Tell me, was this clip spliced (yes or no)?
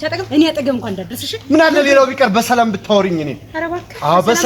no